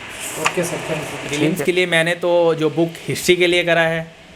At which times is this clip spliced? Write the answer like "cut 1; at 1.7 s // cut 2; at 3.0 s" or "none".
cut 1; at 1.5 s